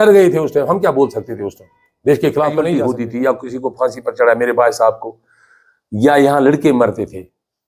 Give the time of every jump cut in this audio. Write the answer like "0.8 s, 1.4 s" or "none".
2.8 s